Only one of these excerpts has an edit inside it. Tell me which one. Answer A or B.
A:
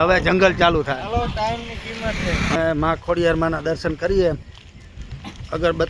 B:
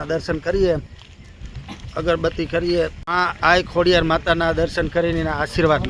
A